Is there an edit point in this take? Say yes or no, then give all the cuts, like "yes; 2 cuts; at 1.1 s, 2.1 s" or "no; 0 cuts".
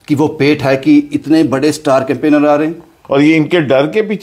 yes; 1 cut; at 2.9 s